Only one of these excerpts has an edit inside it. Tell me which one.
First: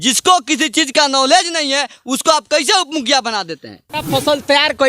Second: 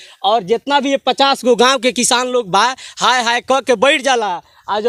first; 1 cut; at 4.0 s

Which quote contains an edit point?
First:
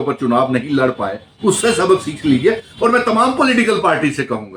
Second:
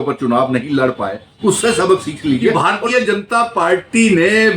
second; 1 cut; at 2.5 s

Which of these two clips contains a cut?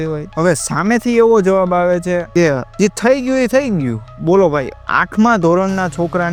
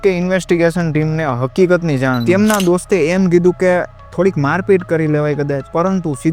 second; 1 cut; at 2.2 s

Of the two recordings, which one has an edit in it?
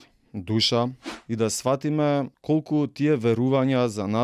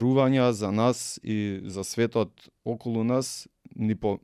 first; 2 cuts; at 1.1 s, 2.3 s

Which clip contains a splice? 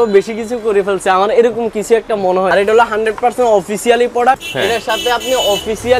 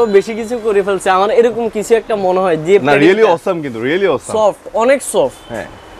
first; 2 cuts; at 2.5 s, 4.4 s

